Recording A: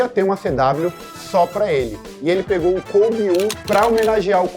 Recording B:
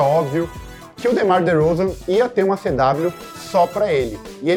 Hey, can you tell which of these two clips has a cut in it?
A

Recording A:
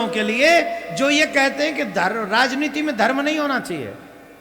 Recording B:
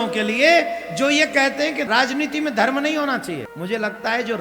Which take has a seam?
B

